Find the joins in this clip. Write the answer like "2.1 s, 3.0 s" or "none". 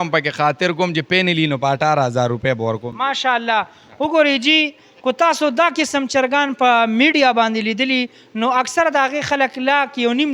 none